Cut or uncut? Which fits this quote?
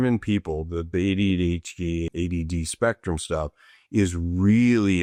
uncut